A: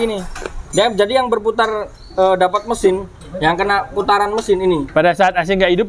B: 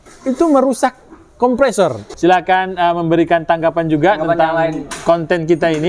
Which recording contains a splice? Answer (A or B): B